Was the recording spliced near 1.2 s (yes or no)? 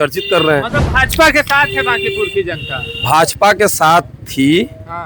no